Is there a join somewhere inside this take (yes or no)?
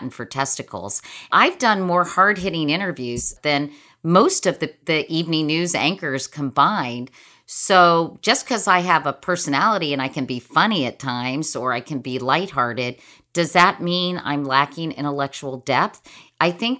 yes